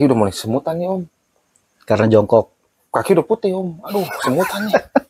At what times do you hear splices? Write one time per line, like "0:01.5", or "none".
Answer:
0:03.9